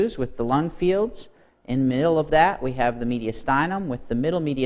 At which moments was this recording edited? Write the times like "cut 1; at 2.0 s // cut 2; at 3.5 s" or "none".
none